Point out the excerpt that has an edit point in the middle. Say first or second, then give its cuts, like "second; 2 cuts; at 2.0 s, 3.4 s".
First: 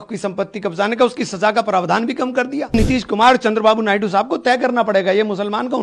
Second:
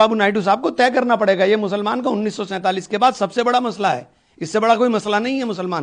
first; 1 cut; at 2.7 s